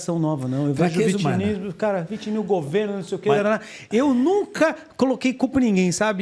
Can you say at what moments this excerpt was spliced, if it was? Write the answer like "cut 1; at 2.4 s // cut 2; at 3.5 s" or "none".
none